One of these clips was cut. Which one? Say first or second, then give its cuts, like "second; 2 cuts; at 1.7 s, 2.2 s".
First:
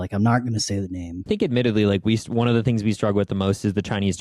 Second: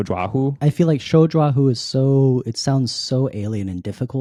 first; 1 cut; at 1.3 s